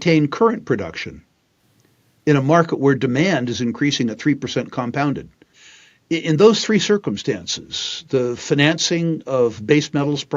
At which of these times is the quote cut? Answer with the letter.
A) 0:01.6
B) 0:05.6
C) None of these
B